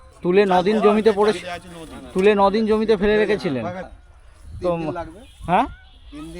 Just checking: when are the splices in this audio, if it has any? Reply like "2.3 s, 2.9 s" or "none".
3.9 s